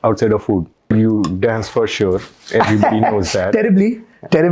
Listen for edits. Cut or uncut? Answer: cut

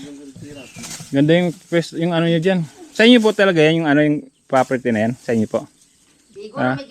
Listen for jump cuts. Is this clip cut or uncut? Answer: uncut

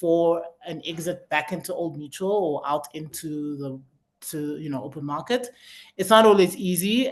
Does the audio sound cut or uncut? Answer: uncut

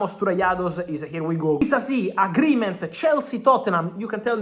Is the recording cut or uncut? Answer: cut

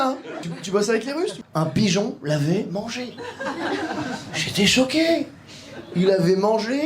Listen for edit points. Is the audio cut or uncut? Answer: cut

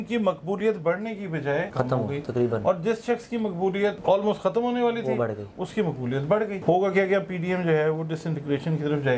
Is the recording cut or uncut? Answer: cut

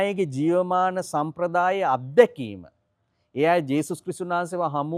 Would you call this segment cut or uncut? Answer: uncut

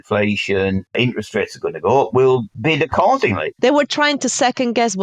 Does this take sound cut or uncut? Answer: cut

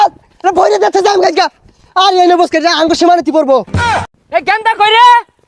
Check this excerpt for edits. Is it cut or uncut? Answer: cut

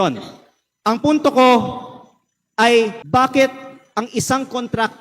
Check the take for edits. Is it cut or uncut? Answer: cut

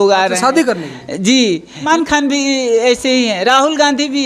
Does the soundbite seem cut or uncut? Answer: cut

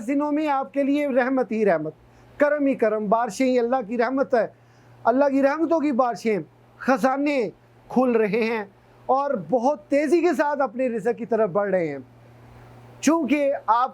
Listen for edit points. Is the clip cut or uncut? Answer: uncut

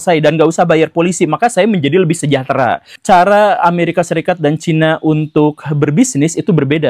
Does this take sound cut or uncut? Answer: cut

